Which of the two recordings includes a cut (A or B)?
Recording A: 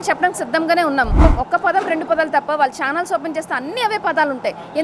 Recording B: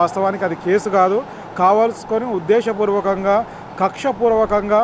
A